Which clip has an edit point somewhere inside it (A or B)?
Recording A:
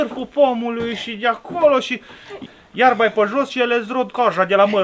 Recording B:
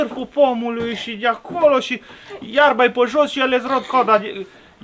A